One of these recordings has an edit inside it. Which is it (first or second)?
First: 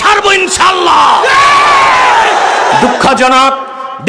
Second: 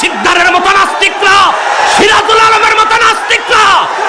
first